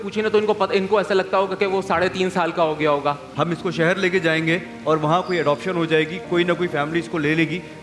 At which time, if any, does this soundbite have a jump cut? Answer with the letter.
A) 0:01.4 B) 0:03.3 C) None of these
B